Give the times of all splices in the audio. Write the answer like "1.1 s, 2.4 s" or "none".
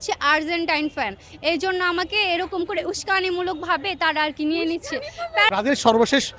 5.5 s